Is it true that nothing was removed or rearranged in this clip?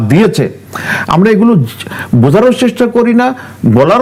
yes; 0 cuts

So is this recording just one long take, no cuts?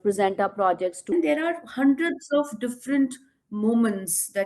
no; 1 cut; at 1.1 s

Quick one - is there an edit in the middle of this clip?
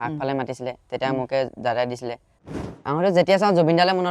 yes; 1 cut; at 2.5 s

